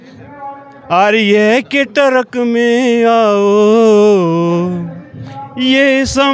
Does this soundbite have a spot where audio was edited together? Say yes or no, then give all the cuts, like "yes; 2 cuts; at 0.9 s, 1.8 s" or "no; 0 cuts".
no; 0 cuts